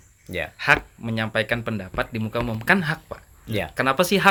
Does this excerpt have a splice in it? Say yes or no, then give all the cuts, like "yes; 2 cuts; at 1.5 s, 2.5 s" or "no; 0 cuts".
no; 0 cuts